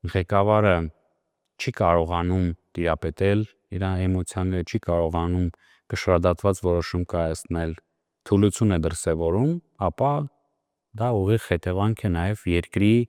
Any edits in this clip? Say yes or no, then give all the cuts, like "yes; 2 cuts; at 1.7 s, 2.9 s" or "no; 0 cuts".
no; 0 cuts